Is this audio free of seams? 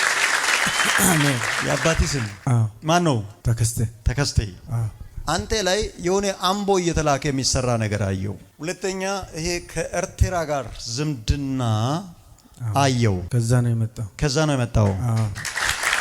no; 2 cuts; at 1.6 s, 5.0 s

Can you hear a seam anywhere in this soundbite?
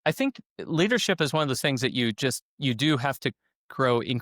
no; 0 cuts

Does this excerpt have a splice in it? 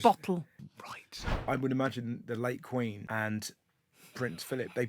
yes; 2 cuts; at 1.1 s, 3.0 s

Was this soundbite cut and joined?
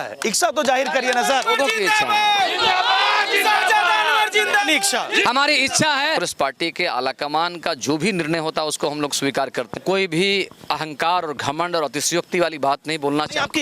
yes; 3 cuts; at 5.2 s, 6.2 s, 9.8 s

